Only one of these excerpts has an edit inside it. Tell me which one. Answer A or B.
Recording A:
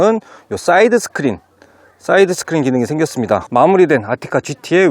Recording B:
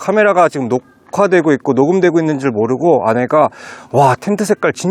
A